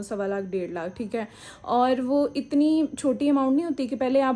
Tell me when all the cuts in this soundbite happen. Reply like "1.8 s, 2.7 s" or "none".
none